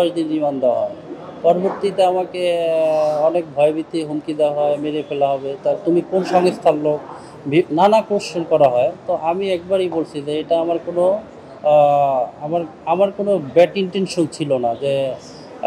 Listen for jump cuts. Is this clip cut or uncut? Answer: uncut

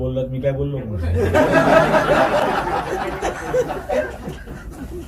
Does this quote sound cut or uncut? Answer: uncut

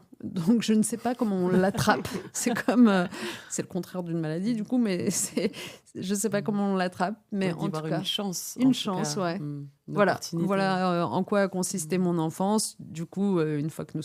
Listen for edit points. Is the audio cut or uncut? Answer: uncut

